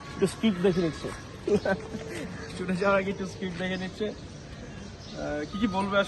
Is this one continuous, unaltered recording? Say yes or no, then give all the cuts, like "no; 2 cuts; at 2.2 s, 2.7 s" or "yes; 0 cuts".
yes; 0 cuts